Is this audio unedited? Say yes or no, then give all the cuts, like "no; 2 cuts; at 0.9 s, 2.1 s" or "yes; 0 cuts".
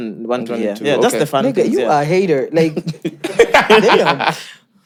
yes; 0 cuts